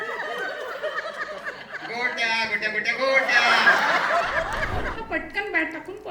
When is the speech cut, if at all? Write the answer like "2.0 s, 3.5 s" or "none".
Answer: 4.9 s